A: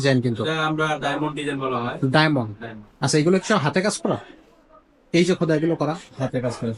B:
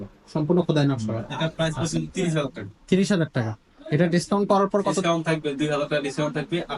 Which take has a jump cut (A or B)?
B